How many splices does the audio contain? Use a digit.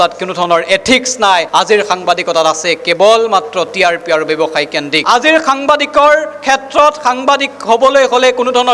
1